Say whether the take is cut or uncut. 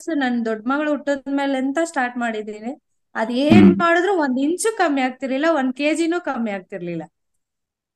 uncut